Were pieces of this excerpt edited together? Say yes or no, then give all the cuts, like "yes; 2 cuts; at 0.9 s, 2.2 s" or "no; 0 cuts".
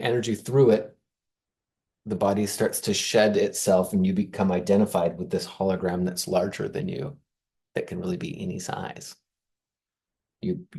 no; 0 cuts